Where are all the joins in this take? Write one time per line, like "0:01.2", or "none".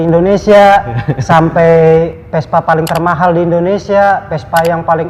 none